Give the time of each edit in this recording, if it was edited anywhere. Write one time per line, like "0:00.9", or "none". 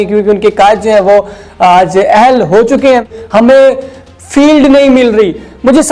0:03.2